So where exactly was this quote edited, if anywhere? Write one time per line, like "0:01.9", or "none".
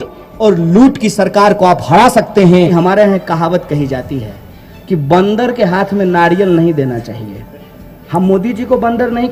0:02.5